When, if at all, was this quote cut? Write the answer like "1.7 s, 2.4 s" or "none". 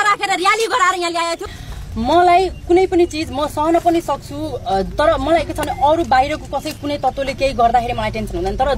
1.5 s